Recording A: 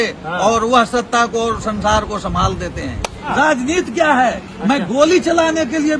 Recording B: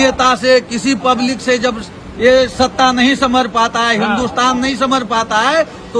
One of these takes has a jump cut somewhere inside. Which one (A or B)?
A